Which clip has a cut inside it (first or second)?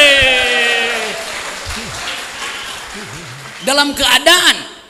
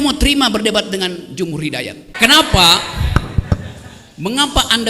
second